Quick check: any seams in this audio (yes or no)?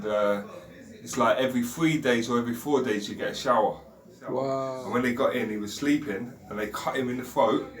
yes